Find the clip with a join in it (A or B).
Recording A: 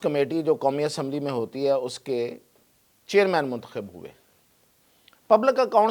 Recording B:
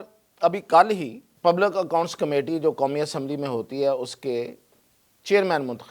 B